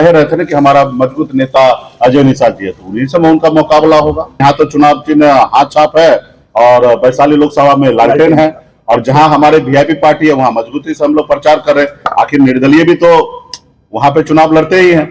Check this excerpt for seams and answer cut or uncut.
cut